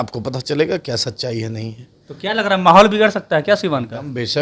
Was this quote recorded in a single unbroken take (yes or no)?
yes